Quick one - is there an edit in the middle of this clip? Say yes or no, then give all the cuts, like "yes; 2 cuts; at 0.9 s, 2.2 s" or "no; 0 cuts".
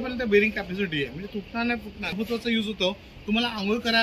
yes; 1 cut; at 2.1 s